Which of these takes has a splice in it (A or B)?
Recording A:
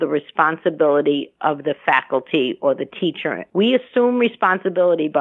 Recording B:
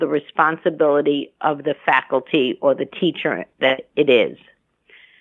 A